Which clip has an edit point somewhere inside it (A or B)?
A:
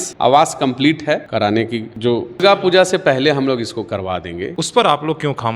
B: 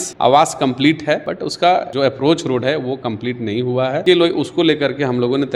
A